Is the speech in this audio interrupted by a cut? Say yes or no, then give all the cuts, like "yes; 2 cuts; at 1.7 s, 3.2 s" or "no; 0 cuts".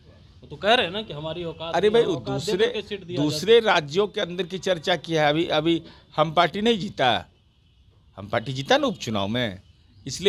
no; 0 cuts